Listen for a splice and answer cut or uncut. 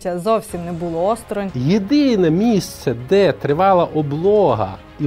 cut